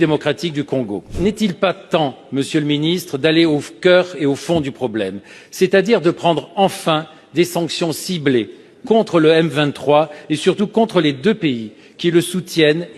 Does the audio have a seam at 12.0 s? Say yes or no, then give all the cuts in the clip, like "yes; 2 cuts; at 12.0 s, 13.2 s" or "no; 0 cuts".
no; 1 cut; at 1.1 s